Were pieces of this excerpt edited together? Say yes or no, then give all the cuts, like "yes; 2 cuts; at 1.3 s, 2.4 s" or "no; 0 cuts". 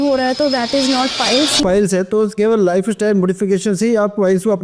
yes; 1 cut; at 1.6 s